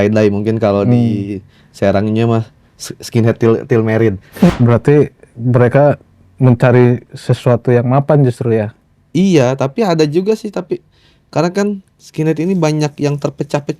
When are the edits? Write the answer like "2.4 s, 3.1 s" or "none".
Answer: 4.5 s